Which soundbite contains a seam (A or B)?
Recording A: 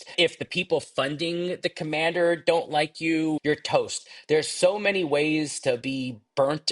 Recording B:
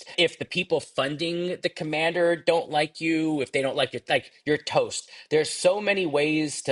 A